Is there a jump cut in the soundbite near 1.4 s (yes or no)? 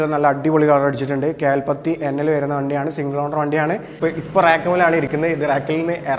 no